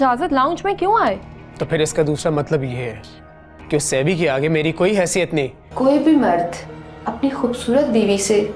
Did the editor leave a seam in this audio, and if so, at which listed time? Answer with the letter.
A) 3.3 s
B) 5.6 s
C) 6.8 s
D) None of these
B